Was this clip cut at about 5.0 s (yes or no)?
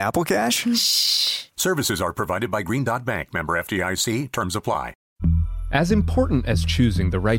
yes